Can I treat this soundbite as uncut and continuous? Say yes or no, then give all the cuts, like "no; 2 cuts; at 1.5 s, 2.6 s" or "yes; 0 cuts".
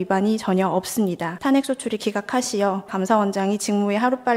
no; 2 cuts; at 1.3 s, 2.9 s